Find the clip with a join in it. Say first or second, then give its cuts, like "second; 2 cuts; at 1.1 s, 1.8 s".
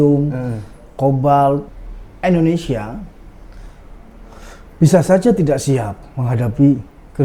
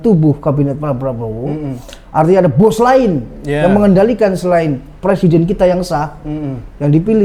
first; 1 cut; at 1.7 s